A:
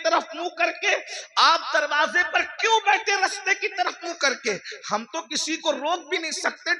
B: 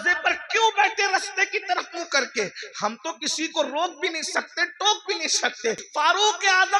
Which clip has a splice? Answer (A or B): B